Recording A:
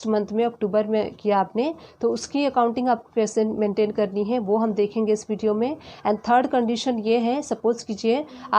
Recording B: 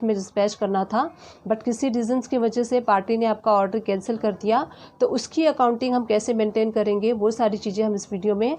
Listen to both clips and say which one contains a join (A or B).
A